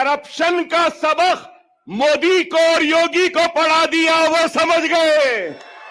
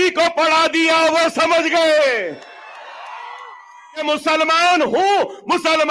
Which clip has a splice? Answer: second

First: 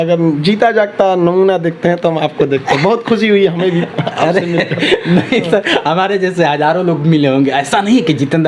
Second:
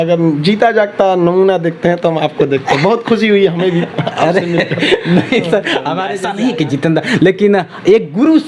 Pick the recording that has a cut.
second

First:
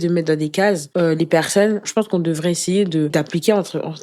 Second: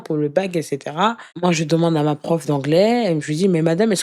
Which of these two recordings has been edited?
first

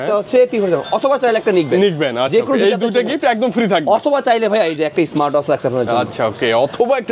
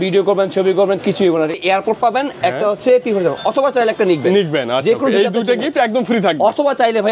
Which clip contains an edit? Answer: second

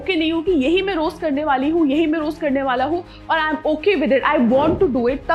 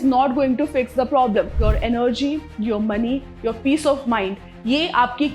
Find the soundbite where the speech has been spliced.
second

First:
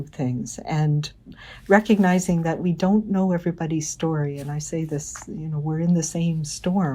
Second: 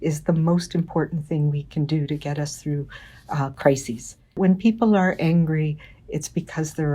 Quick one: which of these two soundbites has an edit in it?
second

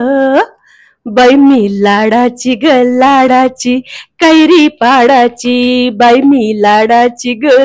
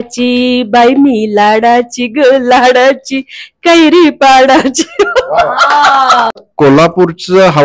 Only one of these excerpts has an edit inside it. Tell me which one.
second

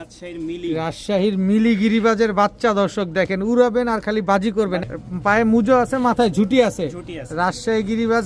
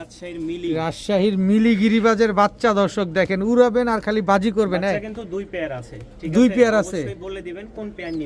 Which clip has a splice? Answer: first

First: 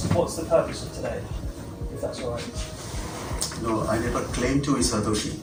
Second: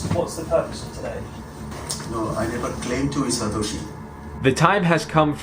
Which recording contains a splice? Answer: second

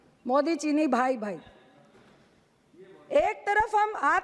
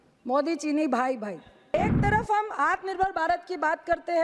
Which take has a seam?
second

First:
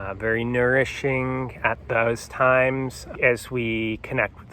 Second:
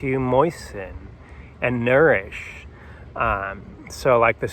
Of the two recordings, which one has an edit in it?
first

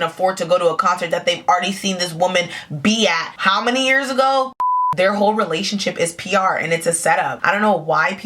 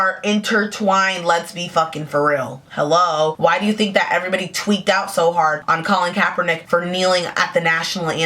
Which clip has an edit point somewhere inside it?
first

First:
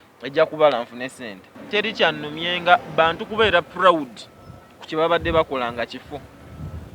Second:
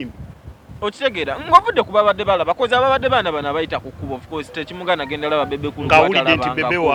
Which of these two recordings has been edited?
first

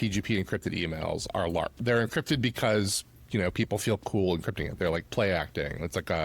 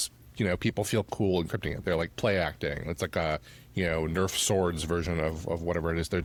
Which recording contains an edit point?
first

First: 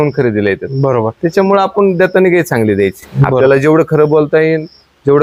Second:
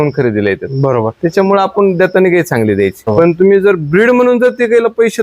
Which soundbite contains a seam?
second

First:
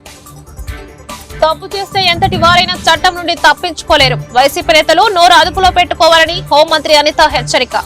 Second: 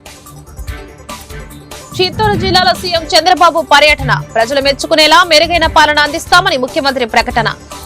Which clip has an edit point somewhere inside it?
second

